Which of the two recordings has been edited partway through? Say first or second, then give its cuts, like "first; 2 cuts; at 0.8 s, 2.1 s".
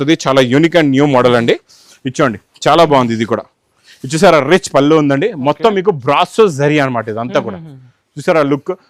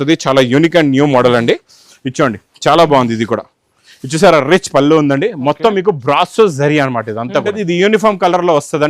second; 1 cut; at 7.5 s